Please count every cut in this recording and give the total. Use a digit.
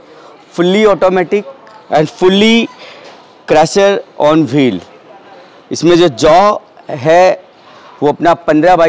0